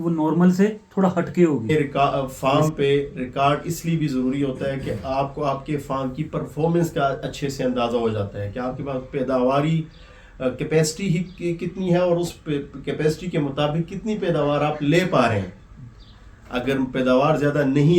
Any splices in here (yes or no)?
yes